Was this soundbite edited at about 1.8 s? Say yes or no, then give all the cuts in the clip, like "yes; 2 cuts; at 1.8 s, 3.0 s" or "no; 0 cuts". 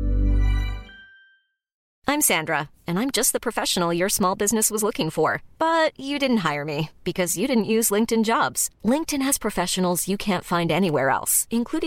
yes; 1 cut; at 1.8 s